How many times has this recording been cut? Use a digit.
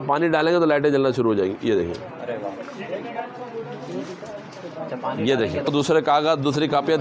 1